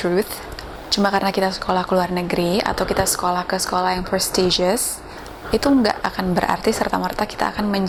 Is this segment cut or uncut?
uncut